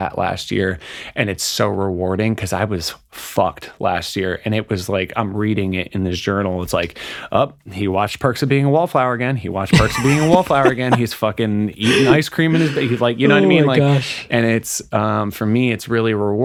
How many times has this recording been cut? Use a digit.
0